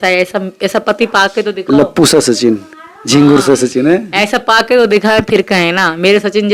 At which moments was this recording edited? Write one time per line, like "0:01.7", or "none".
none